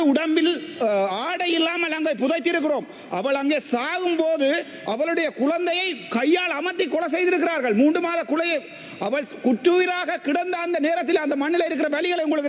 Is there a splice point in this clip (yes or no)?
no